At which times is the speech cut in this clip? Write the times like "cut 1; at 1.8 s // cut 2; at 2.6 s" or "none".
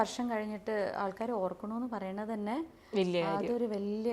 none